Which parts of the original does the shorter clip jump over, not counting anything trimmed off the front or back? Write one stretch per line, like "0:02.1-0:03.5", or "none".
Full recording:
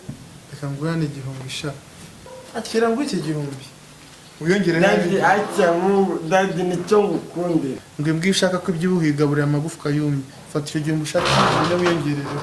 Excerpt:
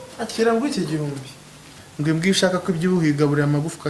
0:04.2-0:07.9